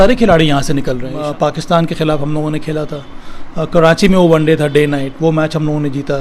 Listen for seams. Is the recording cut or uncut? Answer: cut